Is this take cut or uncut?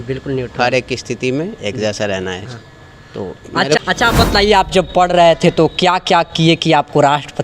cut